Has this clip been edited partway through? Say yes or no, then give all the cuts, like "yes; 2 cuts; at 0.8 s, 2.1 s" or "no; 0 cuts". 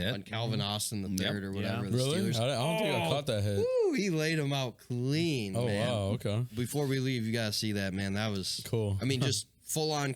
no; 0 cuts